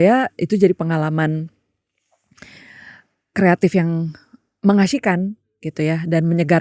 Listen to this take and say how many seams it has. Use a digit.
0